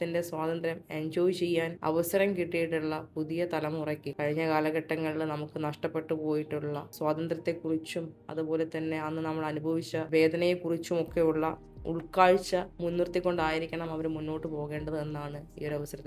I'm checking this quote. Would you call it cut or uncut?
cut